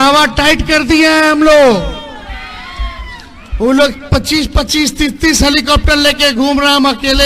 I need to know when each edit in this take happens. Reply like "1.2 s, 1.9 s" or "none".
none